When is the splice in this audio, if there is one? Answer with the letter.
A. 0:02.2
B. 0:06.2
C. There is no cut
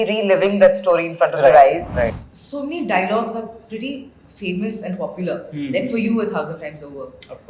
A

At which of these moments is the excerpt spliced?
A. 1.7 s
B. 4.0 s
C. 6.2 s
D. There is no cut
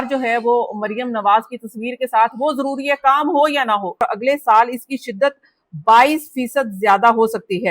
B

